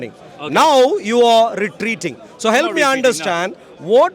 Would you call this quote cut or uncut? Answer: uncut